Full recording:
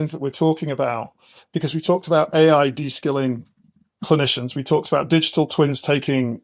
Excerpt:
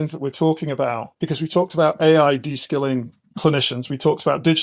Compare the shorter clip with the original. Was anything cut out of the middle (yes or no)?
yes